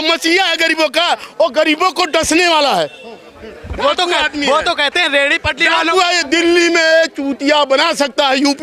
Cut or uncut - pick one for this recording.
uncut